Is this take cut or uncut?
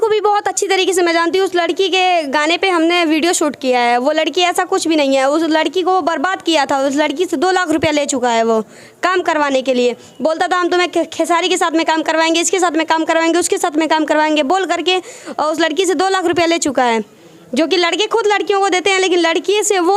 uncut